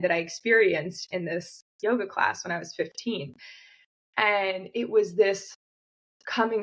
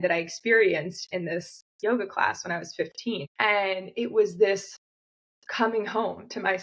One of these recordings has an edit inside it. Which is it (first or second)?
second